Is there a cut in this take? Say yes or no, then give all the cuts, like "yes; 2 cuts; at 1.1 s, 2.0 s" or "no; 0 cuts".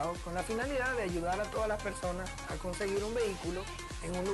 no; 0 cuts